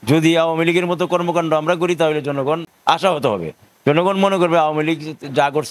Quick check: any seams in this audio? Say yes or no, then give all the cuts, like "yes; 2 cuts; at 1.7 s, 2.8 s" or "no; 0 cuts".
yes; 1 cut; at 2.7 s